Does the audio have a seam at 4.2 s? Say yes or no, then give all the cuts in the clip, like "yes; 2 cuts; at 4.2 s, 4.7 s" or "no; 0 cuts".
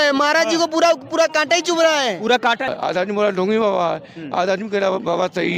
no; 1 cut; at 2.7 s